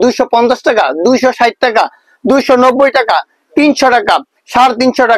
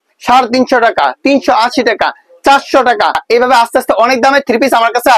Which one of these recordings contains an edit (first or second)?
second